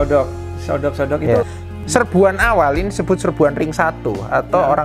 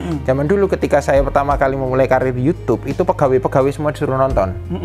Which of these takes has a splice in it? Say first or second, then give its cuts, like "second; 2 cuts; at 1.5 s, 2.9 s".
first; 1 cut; at 1.6 s